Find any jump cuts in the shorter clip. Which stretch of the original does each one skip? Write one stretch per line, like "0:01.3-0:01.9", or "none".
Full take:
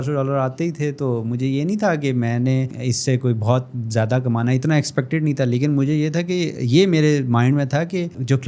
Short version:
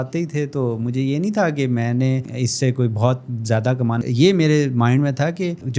0:04.5-0:06.5